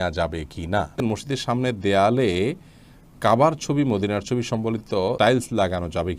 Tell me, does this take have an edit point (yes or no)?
yes